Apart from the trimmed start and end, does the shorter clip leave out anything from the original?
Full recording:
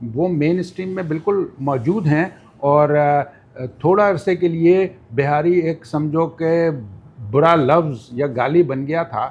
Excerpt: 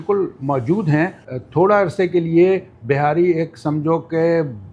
yes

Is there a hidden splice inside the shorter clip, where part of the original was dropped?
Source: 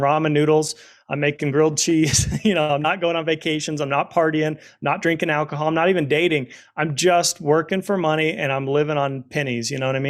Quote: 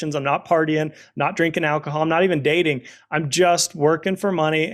no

